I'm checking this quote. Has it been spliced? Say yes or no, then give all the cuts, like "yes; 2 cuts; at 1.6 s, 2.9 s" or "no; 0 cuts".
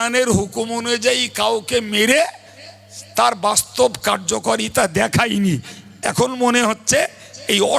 no; 0 cuts